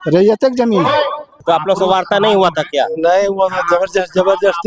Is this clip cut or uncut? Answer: cut